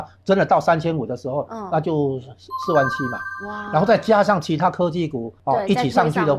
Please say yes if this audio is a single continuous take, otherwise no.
no